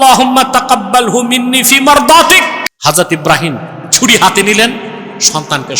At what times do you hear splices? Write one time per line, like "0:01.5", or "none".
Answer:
0:02.7